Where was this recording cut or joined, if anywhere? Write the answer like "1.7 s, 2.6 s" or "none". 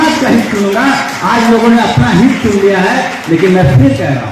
none